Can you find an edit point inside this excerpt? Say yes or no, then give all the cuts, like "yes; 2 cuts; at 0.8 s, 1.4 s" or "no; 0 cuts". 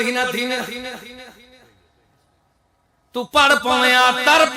no; 0 cuts